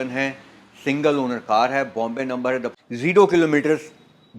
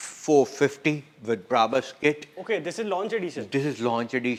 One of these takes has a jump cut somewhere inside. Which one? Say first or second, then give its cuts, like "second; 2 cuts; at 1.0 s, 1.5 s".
first; 1 cut; at 2.7 s